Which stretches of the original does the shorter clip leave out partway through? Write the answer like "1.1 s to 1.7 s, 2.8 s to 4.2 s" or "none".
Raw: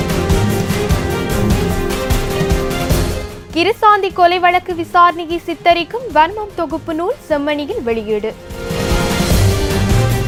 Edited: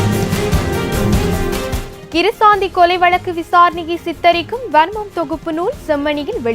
2.2 s to 3.3 s